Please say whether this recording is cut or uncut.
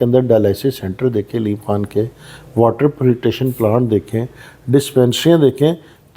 uncut